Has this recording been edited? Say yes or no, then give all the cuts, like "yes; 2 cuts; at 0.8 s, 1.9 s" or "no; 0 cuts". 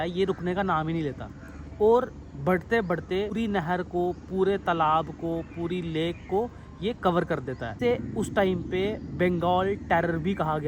yes; 2 cuts; at 3.3 s, 7.8 s